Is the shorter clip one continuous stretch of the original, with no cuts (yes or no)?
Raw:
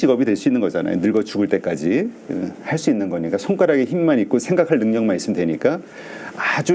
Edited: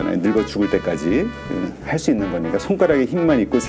yes